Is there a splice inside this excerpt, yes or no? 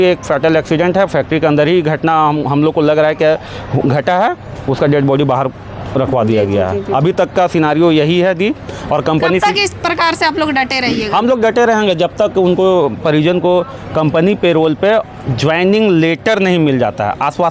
no